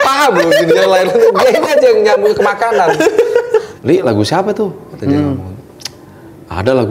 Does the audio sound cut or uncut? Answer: cut